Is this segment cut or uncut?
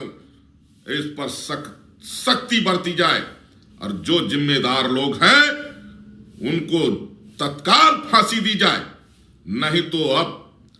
uncut